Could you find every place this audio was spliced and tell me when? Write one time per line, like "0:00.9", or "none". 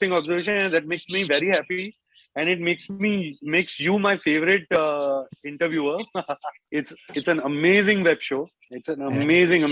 0:06.6